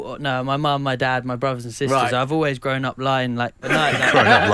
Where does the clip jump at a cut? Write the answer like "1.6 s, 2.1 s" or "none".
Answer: 3.6 s